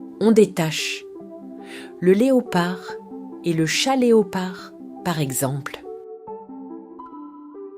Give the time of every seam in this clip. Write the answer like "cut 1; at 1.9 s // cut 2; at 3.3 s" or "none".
cut 1; at 5.7 s